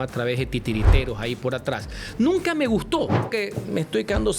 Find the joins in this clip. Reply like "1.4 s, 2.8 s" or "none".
3.3 s